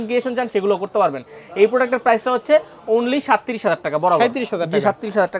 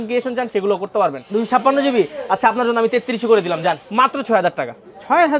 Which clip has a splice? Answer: second; 2 cuts; at 1.2 s, 3.8 s

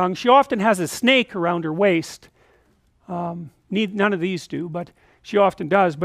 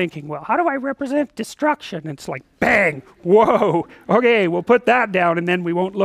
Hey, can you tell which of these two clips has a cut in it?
second; 1 cut; at 1.8 s

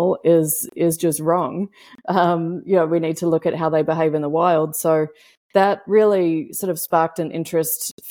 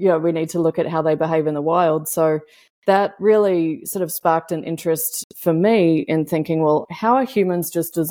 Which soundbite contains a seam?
second; 1 cut; at 6.9 s

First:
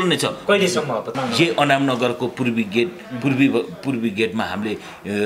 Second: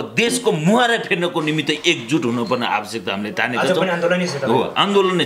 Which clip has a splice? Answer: first; 1 cut; at 1.1 s

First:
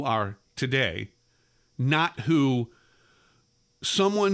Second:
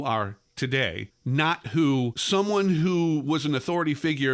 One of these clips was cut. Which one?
second; 2 cuts; at 1.1 s, 2.2 s

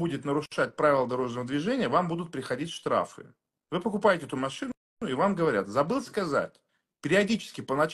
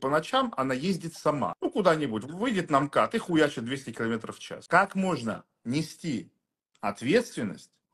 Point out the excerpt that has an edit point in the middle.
second; 2 cuts; at 1.5 s, 4.5 s

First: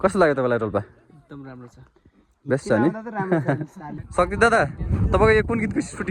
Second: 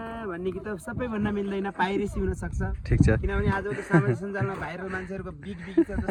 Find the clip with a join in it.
first; 1 cut; at 3.8 s

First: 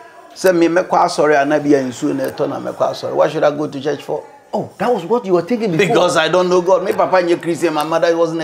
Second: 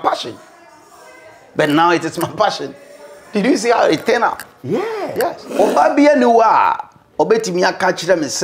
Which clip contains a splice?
second; 1 cut; at 5.4 s

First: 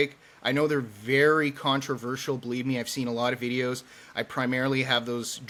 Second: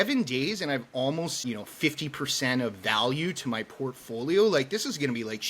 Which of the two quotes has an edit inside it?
second; 1 cut; at 1.4 s

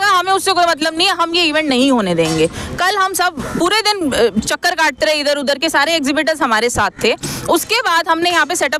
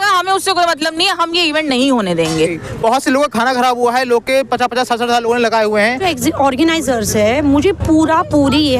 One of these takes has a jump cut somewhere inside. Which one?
second; 2 cuts; at 2.6 s, 6.0 s

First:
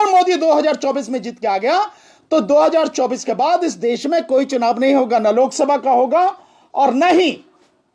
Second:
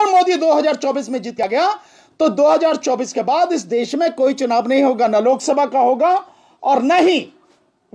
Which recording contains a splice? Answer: second; 1 cut; at 1.4 s

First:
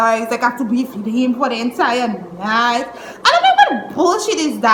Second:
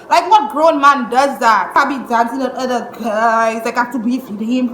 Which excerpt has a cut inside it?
second; 1 cut; at 1.8 s

